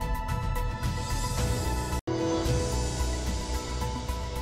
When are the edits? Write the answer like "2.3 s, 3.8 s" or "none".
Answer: none